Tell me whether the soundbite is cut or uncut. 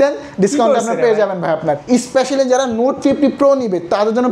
cut